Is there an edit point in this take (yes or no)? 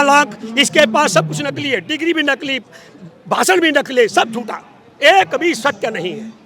no